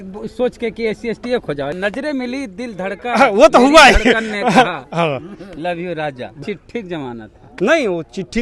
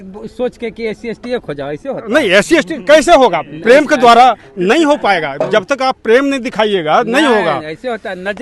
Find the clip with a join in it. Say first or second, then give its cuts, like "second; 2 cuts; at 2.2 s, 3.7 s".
first; 2 cuts; at 1.7 s, 6.4 s